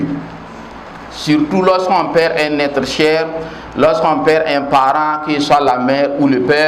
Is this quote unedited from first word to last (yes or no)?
yes